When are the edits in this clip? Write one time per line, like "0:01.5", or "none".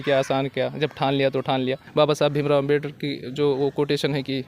0:01.8